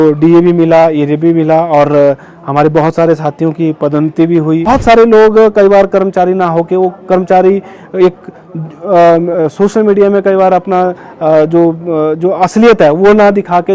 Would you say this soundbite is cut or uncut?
cut